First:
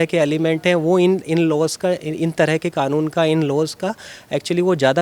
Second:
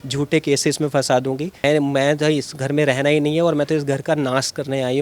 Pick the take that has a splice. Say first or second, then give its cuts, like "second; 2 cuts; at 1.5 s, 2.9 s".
second; 1 cut; at 1.6 s